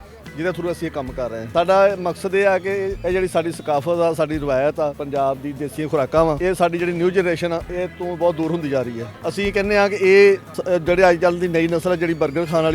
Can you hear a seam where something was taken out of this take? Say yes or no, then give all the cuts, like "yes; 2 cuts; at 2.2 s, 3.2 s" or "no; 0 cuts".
no; 0 cuts